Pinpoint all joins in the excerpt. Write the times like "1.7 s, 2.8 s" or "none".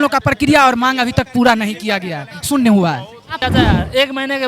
3.4 s